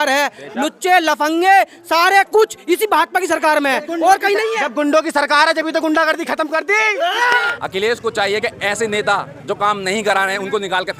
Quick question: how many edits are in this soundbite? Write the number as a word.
one